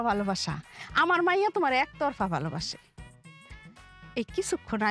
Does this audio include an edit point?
no; 0 cuts

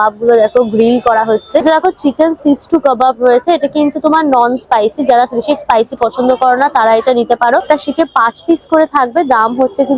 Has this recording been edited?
no; 0 cuts

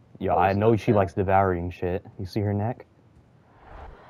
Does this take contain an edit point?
no; 0 cuts

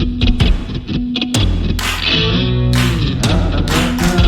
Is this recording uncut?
yes; 0 cuts

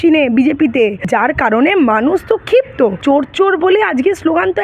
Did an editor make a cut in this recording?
yes; 2 cuts; at 1.0 s, 3.0 s

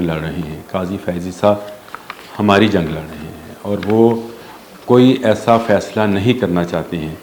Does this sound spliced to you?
no; 0 cuts

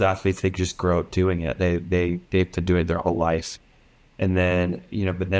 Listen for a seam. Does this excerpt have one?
no; 0 cuts

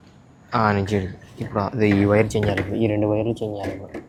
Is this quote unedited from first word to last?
yes; 0 cuts

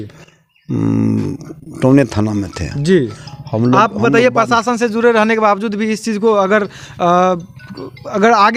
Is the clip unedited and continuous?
yes; 0 cuts

